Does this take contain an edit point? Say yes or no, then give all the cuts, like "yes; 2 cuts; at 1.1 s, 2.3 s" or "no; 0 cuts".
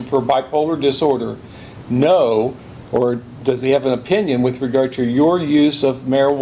no; 0 cuts